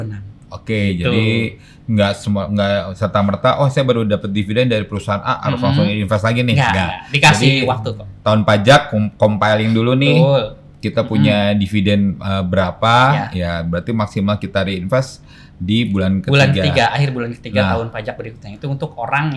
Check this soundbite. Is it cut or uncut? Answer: uncut